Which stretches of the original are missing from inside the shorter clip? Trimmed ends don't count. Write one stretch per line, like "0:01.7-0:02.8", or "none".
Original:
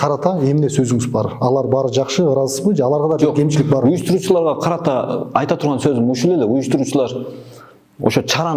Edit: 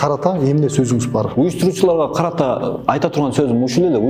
0:01.3-0:03.8